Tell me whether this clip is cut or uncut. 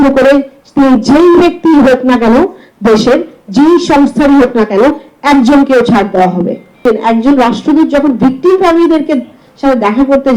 cut